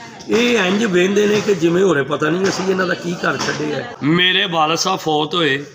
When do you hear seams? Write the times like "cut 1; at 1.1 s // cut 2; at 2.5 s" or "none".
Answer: cut 1; at 3.9 s